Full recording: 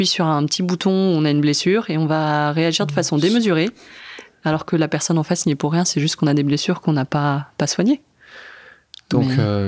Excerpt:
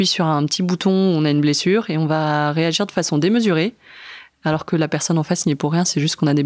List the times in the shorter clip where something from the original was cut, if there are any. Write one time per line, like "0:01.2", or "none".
none